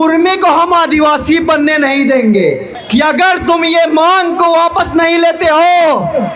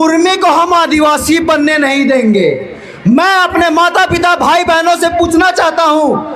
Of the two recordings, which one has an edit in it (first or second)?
first